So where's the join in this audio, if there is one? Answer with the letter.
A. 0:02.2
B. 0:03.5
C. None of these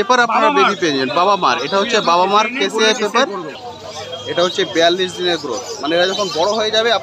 B